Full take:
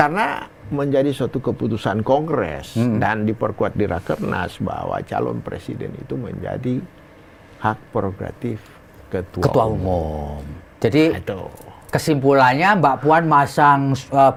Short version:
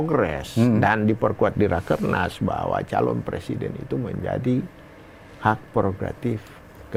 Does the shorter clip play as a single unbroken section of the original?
yes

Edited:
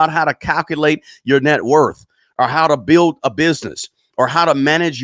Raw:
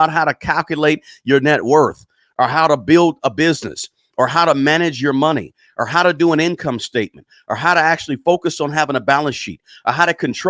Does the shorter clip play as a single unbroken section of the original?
yes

